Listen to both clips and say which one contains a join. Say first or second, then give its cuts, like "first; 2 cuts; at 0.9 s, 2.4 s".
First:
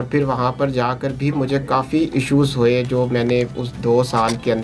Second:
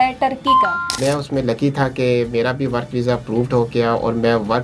second; 1 cut; at 1.0 s